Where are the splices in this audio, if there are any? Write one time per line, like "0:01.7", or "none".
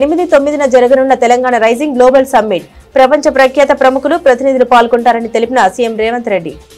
none